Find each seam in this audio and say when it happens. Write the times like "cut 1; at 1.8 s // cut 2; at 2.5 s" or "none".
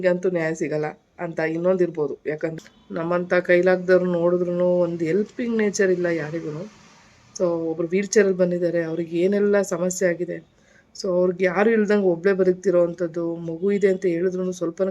cut 1; at 2.6 s